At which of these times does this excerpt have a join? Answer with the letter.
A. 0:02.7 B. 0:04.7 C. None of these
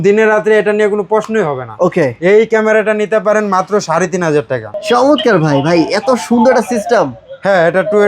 B